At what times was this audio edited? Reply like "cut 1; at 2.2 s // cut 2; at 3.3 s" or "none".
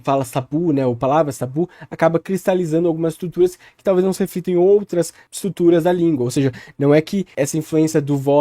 none